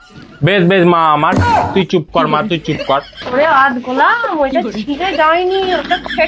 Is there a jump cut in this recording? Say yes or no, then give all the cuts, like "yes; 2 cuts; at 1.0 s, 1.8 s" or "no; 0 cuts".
yes; 1 cut; at 3.2 s